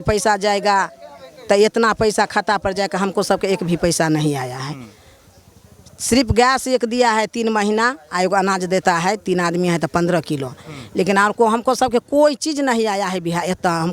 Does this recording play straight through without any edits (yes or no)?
yes